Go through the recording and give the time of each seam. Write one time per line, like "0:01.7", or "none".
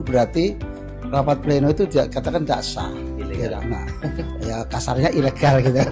none